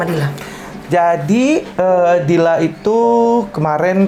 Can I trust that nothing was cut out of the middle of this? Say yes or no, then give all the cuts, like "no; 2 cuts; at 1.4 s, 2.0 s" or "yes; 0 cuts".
yes; 0 cuts